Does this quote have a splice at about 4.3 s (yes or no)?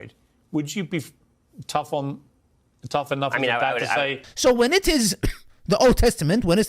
yes